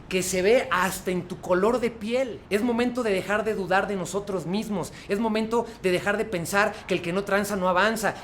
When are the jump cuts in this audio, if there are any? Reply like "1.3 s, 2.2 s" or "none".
2.3 s